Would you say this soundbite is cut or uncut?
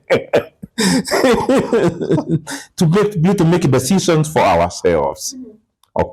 uncut